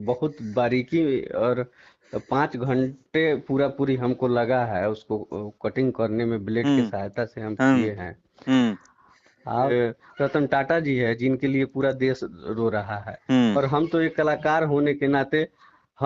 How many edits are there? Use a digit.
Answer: 1